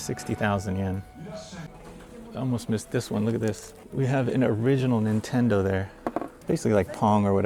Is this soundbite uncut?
no; 3 cuts; at 1.7 s, 3.7 s, 6.3 s

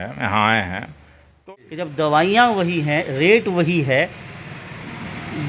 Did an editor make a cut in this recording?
yes; 1 cut; at 1.4 s

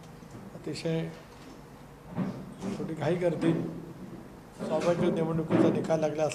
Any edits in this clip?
no; 0 cuts

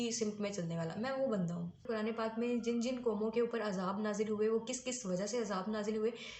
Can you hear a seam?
yes; 1 cut; at 1.8 s

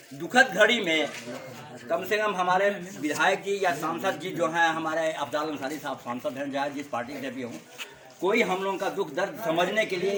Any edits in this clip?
no; 0 cuts

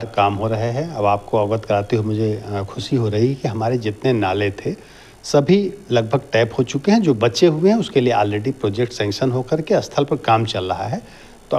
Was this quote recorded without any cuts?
yes; 0 cuts

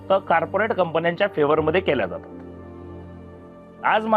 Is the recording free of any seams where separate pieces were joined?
yes; 0 cuts

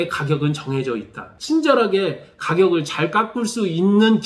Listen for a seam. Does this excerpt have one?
yes; 1 cut; at 1.2 s

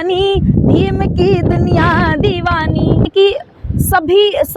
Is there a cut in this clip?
yes; 1 cut; at 3.1 s

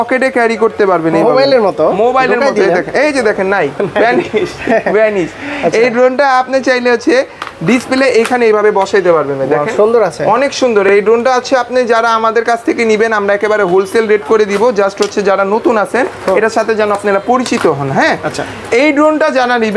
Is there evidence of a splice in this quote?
no; 0 cuts

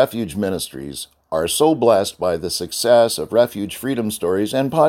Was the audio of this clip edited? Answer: no; 0 cuts

